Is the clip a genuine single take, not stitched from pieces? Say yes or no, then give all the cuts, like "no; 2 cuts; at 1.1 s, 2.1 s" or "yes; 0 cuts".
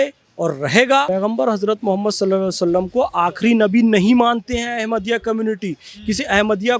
no; 1 cut; at 1.1 s